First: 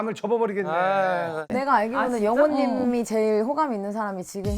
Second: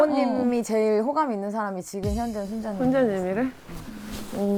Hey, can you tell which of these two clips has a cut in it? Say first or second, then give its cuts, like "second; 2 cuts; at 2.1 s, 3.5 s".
first; 1 cut; at 1.4 s